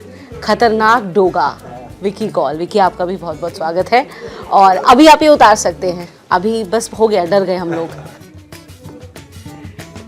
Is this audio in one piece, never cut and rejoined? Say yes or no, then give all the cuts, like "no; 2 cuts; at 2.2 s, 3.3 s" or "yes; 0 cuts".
yes; 0 cuts